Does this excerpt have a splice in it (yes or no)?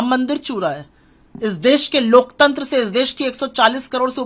no